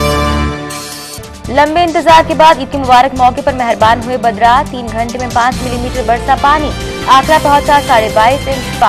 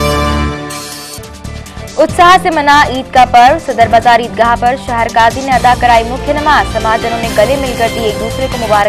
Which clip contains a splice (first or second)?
second